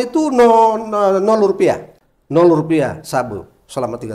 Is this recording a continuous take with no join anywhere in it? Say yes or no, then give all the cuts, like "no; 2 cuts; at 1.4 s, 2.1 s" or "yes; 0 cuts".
no; 1 cut; at 1.9 s